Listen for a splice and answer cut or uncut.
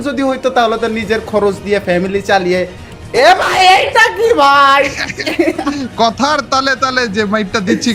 uncut